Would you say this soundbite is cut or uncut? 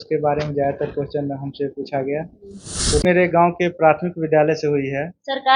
cut